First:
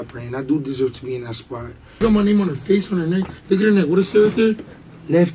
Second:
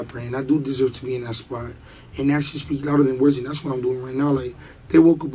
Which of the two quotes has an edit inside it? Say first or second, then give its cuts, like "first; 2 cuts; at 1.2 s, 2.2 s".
first; 1 cut; at 2.0 s